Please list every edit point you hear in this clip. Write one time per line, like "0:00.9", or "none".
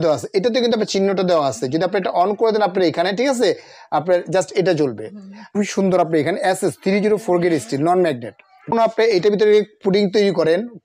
0:05.5
0:08.7